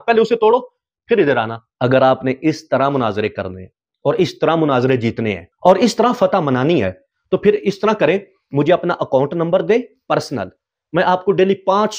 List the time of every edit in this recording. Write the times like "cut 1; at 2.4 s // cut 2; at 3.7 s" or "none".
cut 1; at 1.6 s